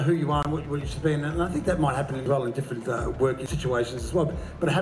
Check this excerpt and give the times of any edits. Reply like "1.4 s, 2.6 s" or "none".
2.2 s, 3.4 s